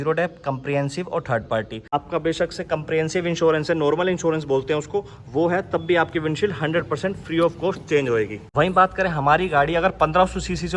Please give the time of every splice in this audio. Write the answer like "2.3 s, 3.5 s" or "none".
1.9 s, 8.5 s